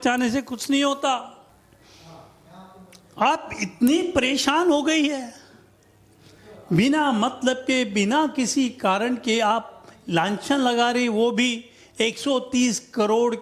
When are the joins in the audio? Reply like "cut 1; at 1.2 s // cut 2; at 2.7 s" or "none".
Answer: cut 1; at 1.6 s